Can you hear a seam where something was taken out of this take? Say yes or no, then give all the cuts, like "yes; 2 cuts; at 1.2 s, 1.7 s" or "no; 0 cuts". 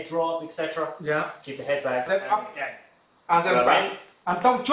yes; 1 cut; at 2.1 s